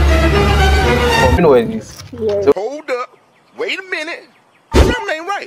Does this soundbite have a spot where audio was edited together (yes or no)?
yes